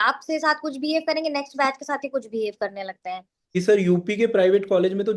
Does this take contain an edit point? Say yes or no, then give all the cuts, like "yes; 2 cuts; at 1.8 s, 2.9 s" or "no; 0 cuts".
yes; 1 cut; at 3.4 s